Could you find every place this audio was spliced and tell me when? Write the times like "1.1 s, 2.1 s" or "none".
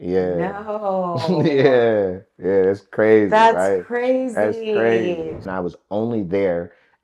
5.4 s